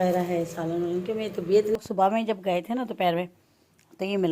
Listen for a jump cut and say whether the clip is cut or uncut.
cut